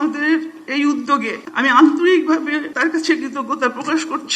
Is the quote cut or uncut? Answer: cut